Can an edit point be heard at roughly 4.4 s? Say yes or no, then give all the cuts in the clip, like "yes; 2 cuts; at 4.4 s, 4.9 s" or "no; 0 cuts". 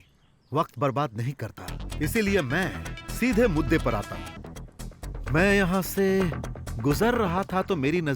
yes; 1 cut; at 4.4 s